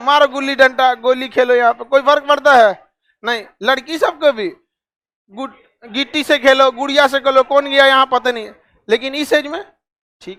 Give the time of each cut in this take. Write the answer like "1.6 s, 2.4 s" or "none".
none

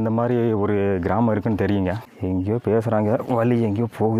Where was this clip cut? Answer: 2.1 s

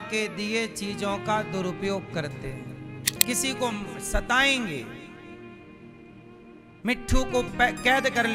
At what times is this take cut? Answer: 3.2 s

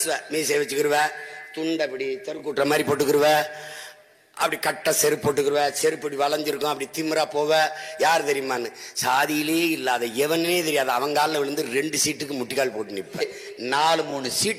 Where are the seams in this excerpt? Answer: 13.2 s

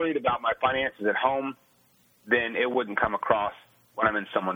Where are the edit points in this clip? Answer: none

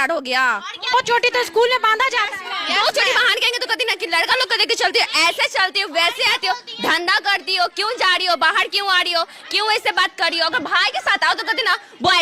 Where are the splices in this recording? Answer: none

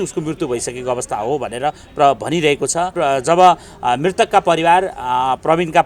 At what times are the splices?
2.9 s

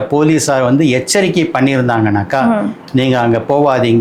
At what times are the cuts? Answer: none

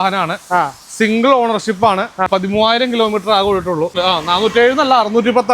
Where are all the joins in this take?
2.3 s, 4.0 s

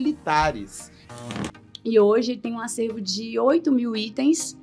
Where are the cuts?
1.2 s

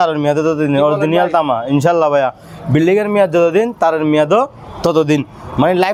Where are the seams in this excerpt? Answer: none

